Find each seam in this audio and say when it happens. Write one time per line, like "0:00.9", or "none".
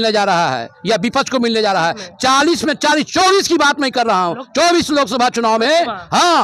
none